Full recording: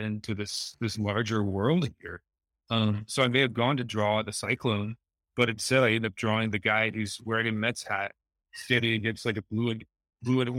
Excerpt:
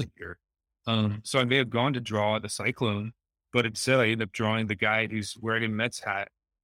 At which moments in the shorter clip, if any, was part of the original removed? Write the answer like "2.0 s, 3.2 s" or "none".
none